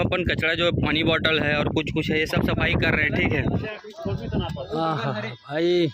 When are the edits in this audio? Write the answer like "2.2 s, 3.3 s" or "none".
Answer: 3.6 s